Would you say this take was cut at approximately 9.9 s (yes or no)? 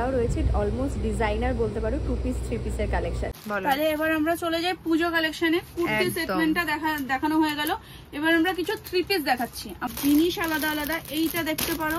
yes